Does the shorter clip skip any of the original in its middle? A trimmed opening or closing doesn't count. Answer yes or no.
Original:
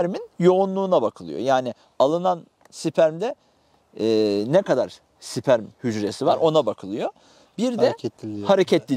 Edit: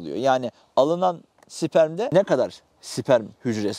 yes